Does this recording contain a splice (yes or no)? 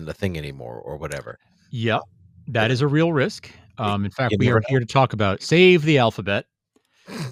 no